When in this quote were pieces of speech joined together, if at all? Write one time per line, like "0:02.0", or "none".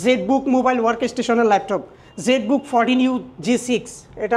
none